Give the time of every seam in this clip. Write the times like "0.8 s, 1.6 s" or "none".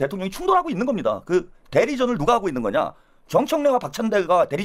none